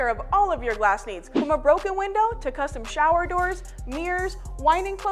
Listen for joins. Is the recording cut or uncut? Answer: cut